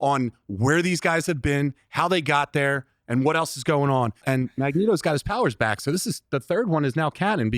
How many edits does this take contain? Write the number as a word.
one